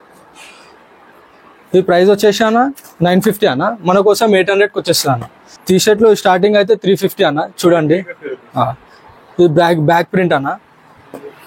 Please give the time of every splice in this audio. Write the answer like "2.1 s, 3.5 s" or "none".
5.5 s